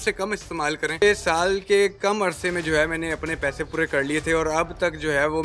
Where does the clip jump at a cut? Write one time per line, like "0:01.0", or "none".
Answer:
0:01.0